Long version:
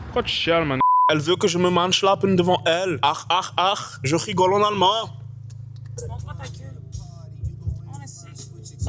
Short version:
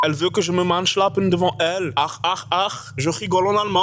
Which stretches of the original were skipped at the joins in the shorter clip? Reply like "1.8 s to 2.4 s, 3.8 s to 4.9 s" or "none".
none

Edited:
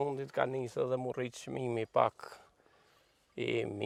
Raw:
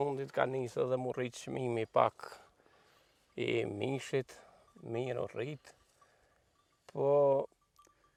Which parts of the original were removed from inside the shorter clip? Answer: none

